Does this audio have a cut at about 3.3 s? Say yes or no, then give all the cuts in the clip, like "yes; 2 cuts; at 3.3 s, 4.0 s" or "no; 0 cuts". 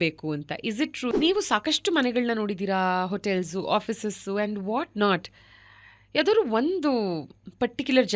no; 1 cut; at 1.1 s